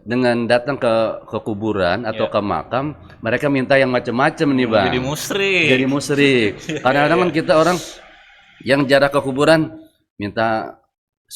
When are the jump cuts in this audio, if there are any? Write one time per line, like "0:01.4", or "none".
none